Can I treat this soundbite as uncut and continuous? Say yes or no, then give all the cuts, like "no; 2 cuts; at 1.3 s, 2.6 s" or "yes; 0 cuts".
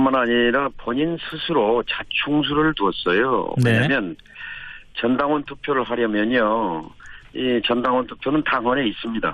no; 1 cut; at 7.5 s